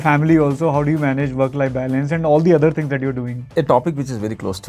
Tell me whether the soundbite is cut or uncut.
cut